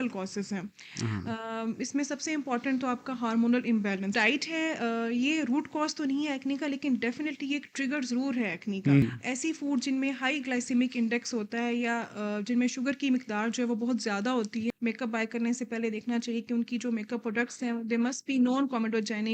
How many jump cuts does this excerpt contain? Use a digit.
3